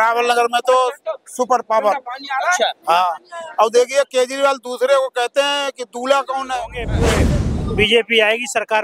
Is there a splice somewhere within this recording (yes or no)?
yes